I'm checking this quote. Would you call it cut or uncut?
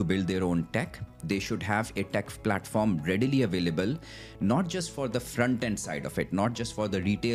uncut